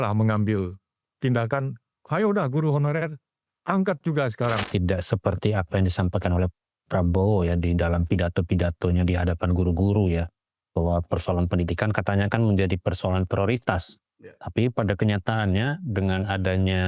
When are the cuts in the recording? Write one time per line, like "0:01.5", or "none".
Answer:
0:04.6